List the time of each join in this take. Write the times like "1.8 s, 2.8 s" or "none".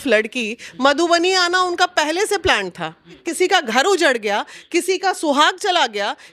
3.2 s